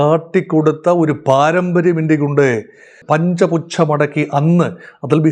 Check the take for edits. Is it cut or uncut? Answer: cut